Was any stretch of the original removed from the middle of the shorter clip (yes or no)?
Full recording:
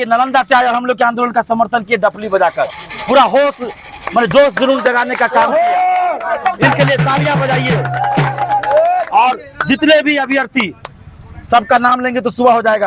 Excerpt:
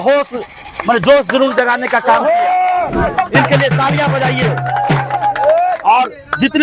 no